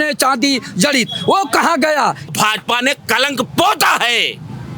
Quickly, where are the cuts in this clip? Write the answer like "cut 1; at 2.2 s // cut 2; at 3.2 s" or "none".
cut 1; at 2.3 s